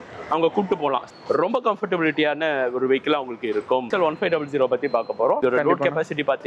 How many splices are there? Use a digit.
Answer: 3